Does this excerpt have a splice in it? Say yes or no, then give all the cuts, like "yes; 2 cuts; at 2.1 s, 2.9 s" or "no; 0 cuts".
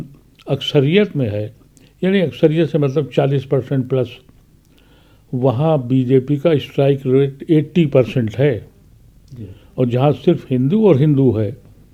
no; 0 cuts